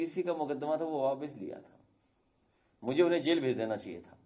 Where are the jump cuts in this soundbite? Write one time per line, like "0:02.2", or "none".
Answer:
none